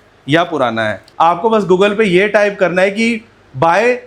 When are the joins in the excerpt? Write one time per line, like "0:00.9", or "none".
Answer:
0:01.1